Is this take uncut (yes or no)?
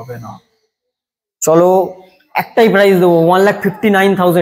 yes